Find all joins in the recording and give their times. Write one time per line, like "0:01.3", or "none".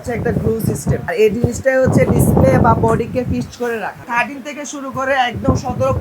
0:01.0
0:04.0

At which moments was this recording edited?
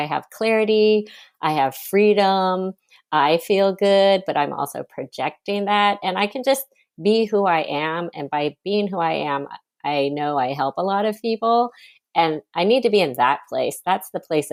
none

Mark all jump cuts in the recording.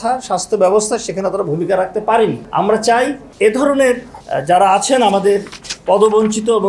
0:02.4
0:03.2
0:04.2

